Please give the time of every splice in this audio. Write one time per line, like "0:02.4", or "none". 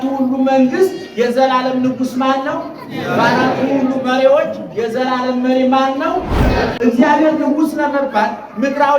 0:06.7